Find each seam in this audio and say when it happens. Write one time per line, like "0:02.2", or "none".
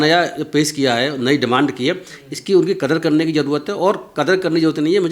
none